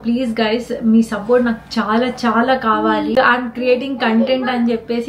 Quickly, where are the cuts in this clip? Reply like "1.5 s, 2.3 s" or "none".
3.1 s